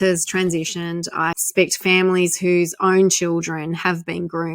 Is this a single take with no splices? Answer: no; 1 cut; at 1.4 s

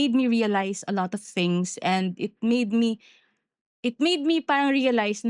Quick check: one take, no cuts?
yes; 0 cuts

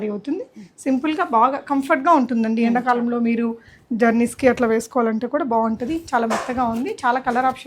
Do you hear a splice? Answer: no; 0 cuts

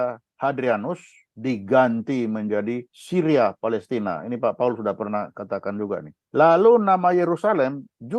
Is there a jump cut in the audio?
no; 0 cuts

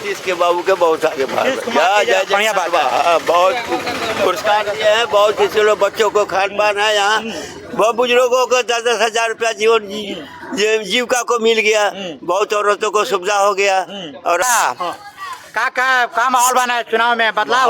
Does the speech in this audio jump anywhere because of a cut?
yes; 1 cut; at 14.4 s

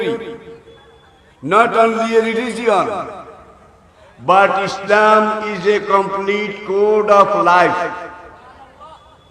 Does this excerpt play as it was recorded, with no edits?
yes; 0 cuts

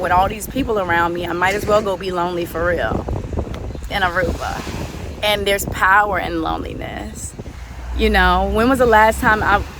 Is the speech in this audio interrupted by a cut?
no; 0 cuts

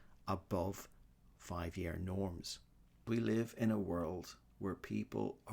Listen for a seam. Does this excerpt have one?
yes; 1 cut; at 3.0 s

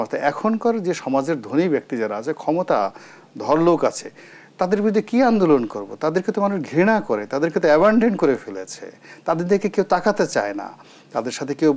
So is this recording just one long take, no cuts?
yes; 0 cuts

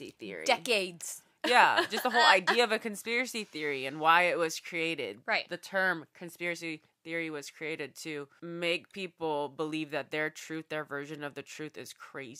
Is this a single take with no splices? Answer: no; 1 cut; at 8.3 s

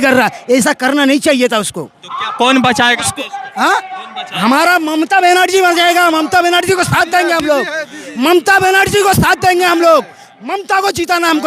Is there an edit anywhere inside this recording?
no; 0 cuts

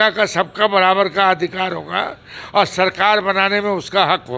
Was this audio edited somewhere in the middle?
no; 0 cuts

